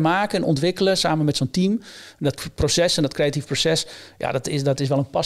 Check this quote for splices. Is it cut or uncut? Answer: uncut